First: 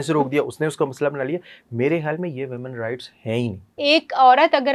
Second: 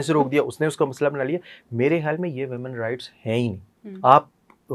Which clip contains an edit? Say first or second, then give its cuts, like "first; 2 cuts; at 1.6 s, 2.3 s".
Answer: first; 1 cut; at 3.6 s